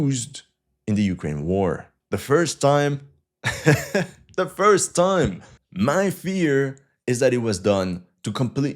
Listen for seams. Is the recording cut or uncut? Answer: cut